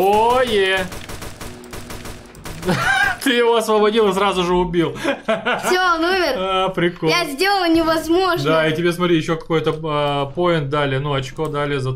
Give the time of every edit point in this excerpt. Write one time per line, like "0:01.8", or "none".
none